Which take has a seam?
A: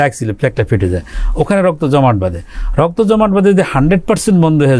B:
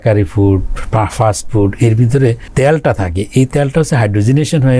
B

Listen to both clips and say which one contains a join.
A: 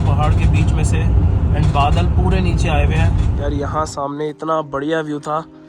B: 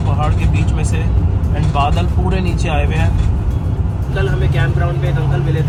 A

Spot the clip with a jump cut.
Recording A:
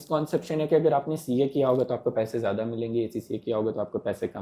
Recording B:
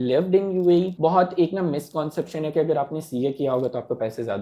B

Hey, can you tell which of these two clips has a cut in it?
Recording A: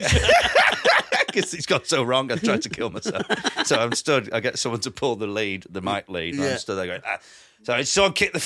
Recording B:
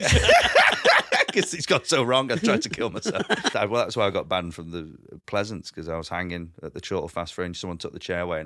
B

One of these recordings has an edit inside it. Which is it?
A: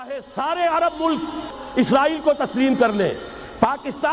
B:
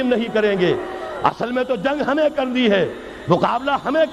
A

